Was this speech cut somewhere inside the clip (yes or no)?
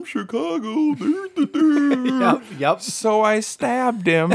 no